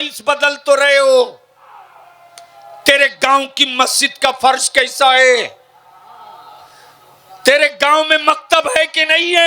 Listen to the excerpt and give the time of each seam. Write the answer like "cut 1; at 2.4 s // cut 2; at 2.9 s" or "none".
none